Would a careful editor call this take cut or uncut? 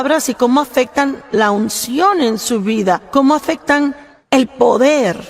cut